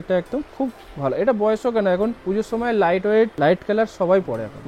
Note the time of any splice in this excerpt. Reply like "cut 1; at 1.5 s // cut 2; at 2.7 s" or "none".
cut 1; at 2.2 s // cut 2; at 3.3 s